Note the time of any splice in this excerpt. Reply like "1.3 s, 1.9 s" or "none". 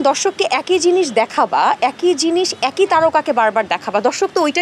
none